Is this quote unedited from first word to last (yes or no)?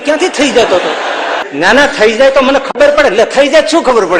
no